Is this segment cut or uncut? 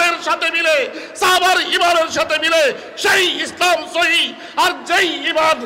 uncut